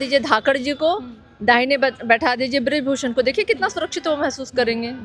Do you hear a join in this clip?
no; 0 cuts

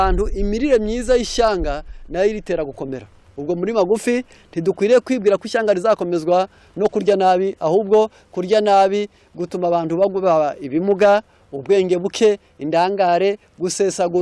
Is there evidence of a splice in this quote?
no; 0 cuts

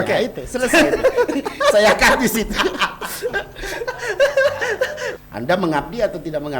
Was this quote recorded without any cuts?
no; 1 cut; at 5.0 s

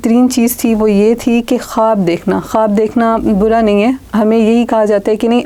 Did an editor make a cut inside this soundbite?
no; 0 cuts

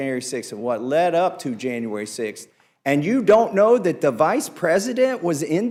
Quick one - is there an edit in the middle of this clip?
no; 0 cuts

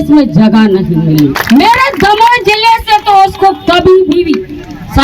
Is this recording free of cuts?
no; 1 cut; at 1.4 s

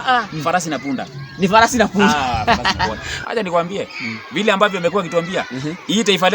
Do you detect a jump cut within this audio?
yes; 1 cut; at 3.1 s

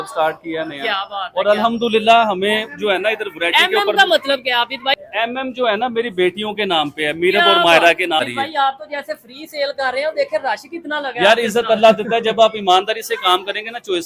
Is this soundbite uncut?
no; 2 cuts; at 5.0 s, 8.2 s

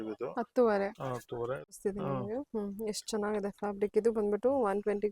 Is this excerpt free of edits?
no; 1 cut; at 1.7 s

